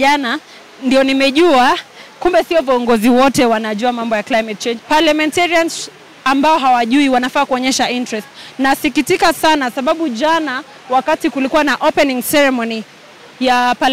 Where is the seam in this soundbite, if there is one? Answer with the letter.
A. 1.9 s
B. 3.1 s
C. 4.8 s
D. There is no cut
C